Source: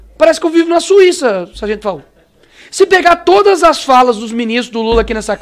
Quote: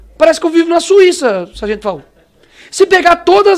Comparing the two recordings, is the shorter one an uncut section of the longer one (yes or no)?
yes